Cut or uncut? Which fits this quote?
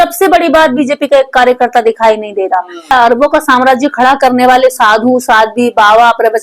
cut